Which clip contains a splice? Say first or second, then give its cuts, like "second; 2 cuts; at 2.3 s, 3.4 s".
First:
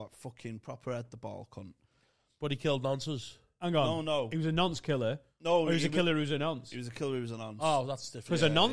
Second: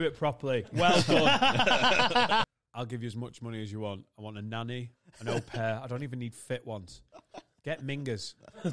second; 1 cut; at 2.5 s